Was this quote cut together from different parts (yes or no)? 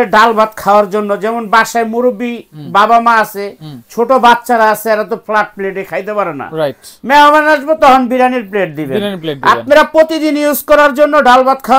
no